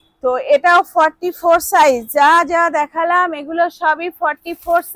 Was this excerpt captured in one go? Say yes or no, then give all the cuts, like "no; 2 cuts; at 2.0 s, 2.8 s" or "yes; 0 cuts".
yes; 0 cuts